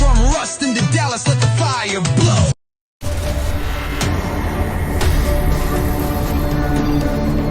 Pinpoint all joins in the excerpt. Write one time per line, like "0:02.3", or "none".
0:03.3